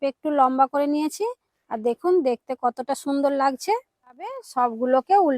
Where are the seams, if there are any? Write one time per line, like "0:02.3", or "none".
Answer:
0:04.5

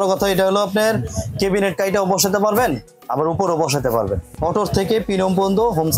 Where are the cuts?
0:04.3

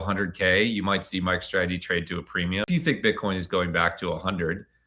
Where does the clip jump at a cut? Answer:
0:02.7

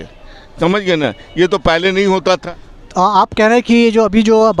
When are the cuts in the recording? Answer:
none

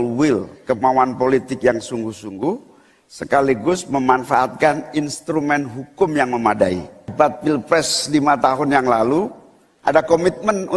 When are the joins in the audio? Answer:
0:07.1

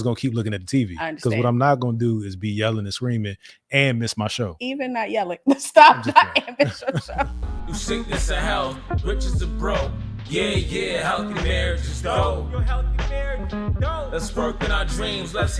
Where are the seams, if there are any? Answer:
0:07.5

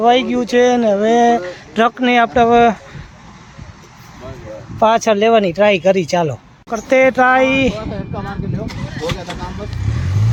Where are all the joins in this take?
none

